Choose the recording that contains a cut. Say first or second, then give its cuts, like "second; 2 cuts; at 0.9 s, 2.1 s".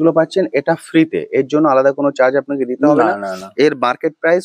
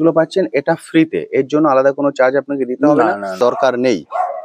second; 1 cut; at 3.4 s